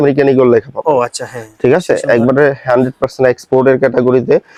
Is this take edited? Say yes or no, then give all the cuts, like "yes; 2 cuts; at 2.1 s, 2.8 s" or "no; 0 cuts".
no; 0 cuts